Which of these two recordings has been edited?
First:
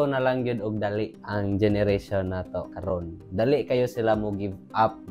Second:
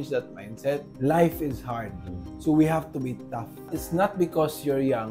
second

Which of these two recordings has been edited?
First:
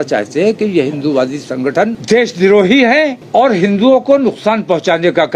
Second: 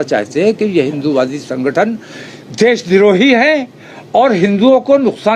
first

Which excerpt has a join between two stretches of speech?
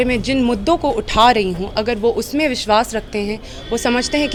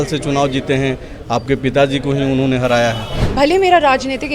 second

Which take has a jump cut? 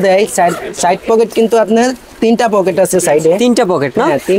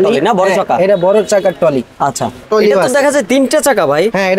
second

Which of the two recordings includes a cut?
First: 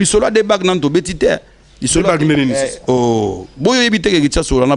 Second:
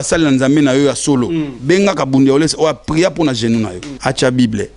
second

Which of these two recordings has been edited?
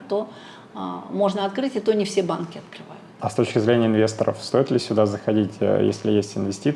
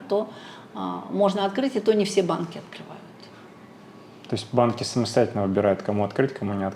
first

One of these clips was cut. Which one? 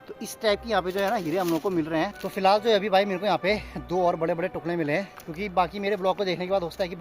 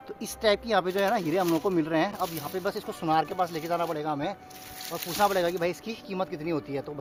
first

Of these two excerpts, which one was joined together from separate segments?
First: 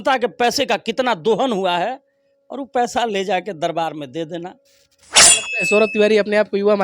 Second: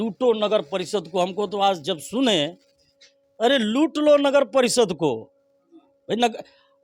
first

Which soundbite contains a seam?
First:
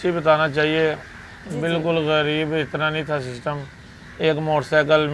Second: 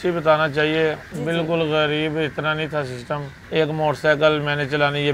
second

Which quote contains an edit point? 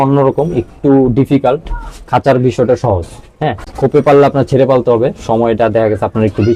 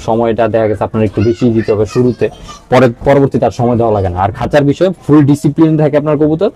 first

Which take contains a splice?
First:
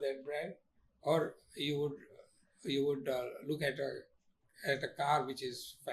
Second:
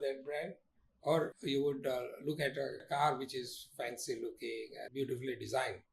second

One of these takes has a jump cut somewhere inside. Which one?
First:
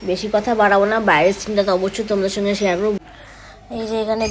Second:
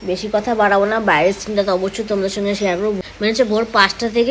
first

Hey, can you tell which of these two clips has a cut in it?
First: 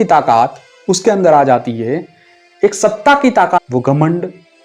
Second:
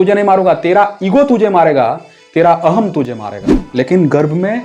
second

